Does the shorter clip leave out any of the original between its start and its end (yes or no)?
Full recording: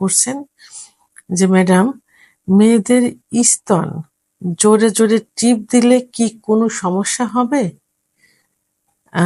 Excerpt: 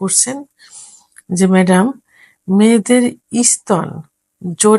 no